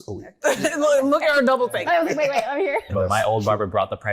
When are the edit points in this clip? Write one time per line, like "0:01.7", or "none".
0:02.9

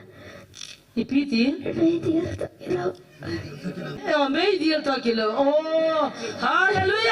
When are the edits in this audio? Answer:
0:04.0

